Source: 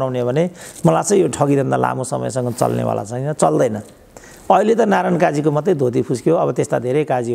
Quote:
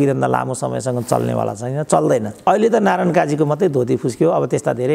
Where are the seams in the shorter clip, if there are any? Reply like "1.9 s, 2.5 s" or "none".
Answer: 2.5 s